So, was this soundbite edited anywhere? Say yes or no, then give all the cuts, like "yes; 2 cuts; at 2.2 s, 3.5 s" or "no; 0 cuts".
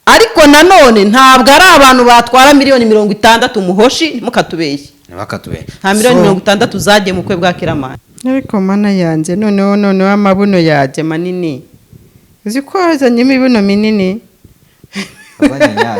yes; 1 cut; at 8.0 s